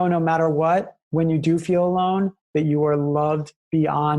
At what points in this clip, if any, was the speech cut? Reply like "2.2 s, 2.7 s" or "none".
1.0 s